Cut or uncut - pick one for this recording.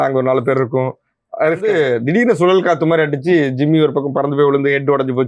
cut